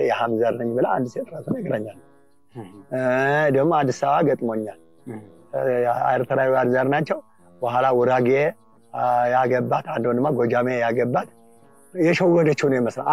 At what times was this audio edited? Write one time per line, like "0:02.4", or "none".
none

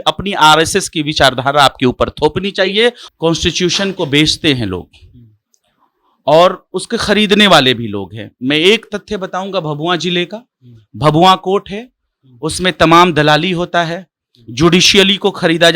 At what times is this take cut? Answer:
0:03.0

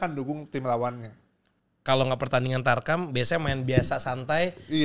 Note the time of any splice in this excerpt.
0:01.6

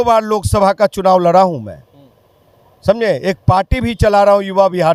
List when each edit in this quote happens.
none

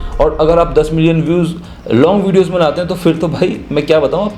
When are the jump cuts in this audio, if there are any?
none

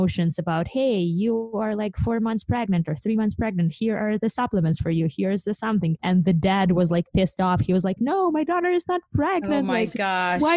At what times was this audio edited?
none

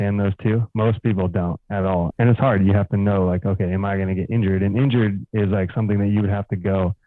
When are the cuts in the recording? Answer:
0:02.1

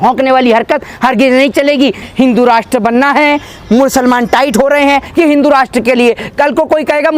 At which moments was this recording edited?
0:02.0
0:05.1

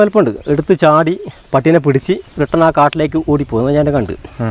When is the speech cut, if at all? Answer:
0:02.3

